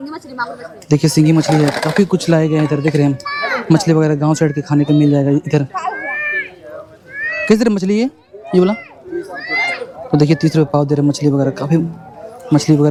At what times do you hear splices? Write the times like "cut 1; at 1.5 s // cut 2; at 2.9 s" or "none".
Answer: none